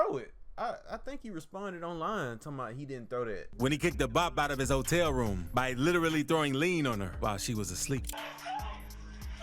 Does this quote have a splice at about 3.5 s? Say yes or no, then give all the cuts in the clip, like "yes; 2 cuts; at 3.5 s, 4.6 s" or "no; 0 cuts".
yes; 1 cut; at 3.5 s